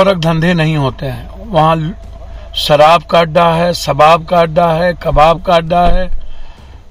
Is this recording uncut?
yes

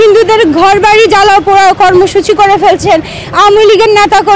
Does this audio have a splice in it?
yes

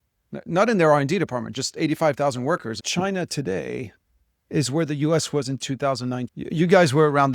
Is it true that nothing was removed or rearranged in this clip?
no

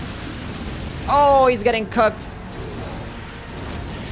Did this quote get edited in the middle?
no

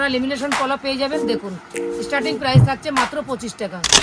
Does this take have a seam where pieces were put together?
no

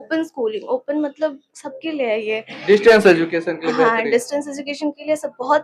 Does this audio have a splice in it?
no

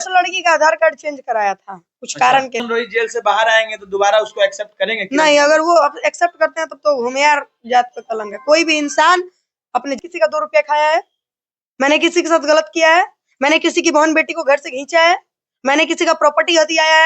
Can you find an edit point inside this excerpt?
yes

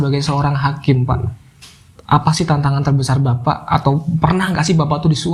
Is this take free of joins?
yes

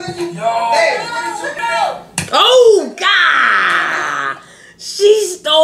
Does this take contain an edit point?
yes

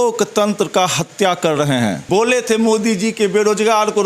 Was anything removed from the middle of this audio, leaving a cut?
yes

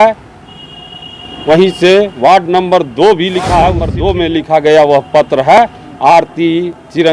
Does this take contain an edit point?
yes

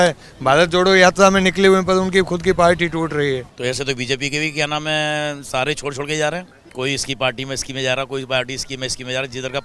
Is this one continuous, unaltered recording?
no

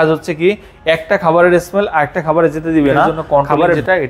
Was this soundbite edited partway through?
yes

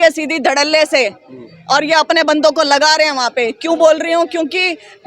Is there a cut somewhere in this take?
no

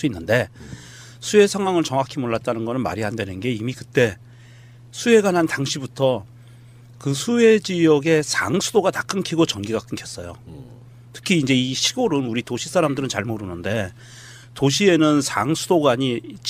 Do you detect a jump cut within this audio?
no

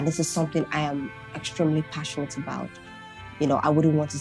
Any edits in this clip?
yes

